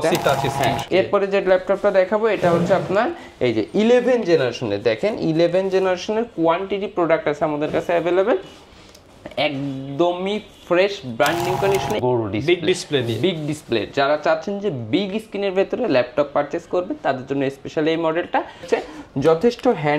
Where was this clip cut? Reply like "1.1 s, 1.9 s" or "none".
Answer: 0.8 s, 12.0 s, 18.7 s